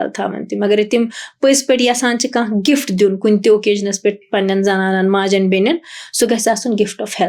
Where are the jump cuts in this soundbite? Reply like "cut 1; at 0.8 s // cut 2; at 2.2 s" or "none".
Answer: none